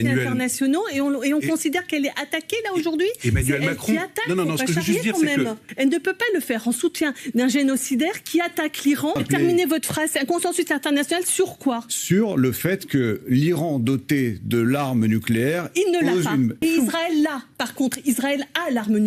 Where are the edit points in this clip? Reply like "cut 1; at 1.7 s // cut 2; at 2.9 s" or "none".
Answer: cut 1; at 5.7 s // cut 2; at 9.2 s // cut 3; at 16.6 s

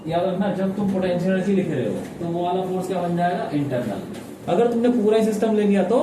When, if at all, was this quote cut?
cut 1; at 4.4 s

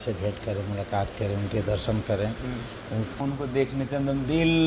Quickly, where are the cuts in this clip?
cut 1; at 3.3 s

